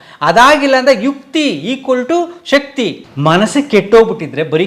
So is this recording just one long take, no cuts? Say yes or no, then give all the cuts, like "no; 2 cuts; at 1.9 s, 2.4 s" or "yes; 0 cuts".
no; 1 cut; at 3.1 s